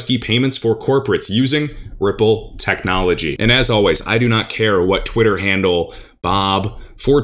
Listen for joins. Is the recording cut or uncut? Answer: cut